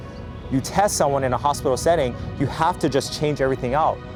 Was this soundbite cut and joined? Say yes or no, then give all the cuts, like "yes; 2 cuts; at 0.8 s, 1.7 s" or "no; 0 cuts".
no; 0 cuts